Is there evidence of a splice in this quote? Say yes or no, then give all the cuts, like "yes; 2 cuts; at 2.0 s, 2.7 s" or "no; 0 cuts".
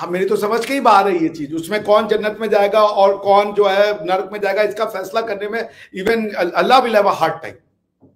no; 0 cuts